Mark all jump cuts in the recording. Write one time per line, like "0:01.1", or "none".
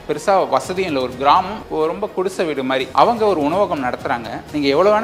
none